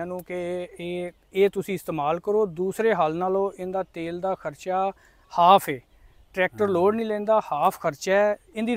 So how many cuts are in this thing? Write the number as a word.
zero